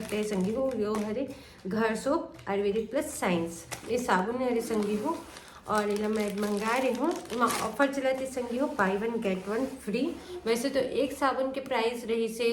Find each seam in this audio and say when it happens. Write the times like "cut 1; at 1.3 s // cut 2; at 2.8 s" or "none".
none